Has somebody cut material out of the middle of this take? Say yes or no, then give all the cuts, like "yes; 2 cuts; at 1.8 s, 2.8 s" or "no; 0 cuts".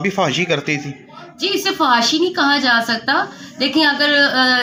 no; 0 cuts